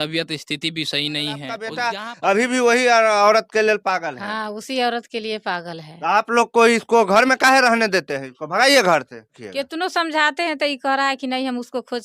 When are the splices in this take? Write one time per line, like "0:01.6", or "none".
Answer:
0:01.8
0:09.4